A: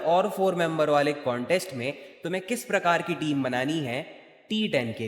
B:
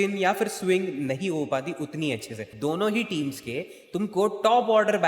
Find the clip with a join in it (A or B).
B